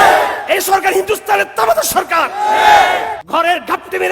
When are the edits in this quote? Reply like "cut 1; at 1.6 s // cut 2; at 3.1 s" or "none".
cut 1; at 3.2 s

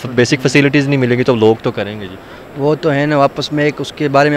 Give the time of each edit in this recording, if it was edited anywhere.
none

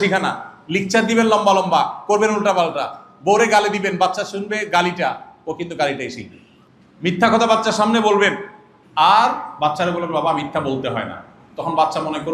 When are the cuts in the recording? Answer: none

